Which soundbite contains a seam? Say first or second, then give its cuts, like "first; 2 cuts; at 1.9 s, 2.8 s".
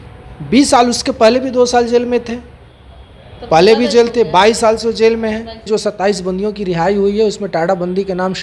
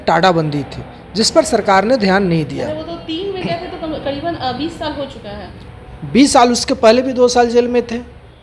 first; 1 cut; at 5.7 s